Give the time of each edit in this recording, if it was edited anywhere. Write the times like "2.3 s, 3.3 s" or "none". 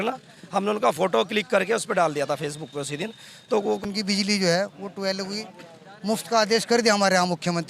3.8 s

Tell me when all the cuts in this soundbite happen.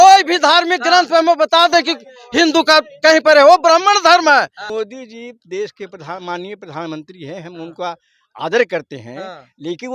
4.6 s

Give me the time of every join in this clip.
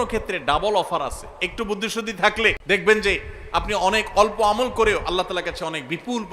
2.6 s

